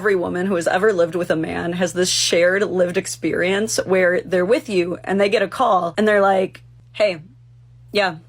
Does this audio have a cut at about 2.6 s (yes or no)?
no